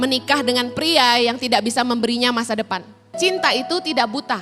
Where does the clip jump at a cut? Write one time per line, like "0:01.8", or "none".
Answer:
0:03.2